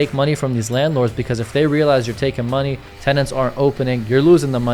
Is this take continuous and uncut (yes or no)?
yes